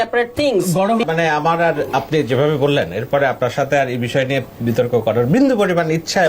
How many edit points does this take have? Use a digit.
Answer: 1